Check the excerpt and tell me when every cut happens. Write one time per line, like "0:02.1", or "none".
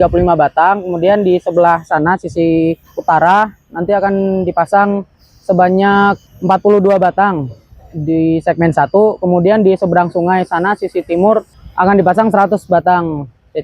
0:02.9
0:06.3
0:11.6